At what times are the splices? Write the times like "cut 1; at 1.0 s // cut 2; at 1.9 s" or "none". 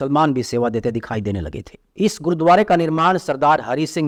none